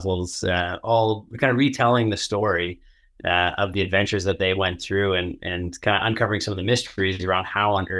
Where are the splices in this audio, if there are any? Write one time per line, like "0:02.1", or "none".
none